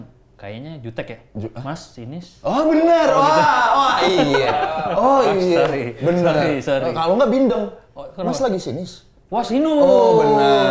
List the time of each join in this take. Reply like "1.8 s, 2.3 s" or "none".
none